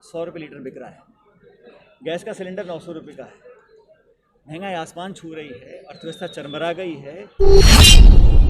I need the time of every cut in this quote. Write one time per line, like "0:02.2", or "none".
0:07.4